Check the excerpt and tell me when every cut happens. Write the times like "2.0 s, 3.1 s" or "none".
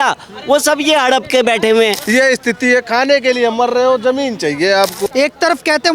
2.0 s, 5.1 s